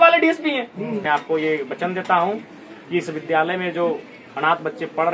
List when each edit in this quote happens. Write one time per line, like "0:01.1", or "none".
0:01.0